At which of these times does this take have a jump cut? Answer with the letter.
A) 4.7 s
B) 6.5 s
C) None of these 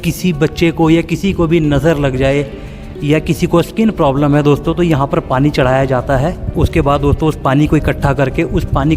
B